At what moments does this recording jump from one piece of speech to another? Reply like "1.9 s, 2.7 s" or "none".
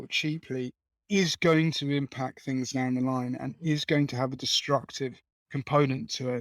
none